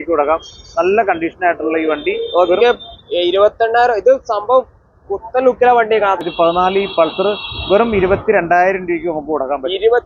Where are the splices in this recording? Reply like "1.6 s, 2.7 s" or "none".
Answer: 6.2 s